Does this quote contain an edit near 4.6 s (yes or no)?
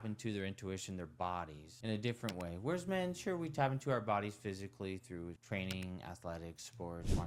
no